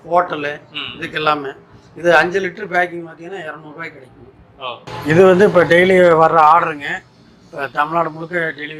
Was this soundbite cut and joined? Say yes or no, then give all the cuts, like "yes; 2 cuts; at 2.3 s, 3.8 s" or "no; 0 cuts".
no; 0 cuts